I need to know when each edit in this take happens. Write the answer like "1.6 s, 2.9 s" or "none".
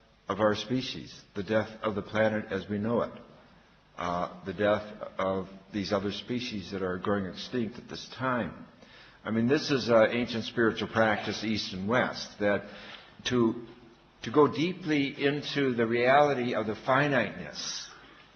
15.6 s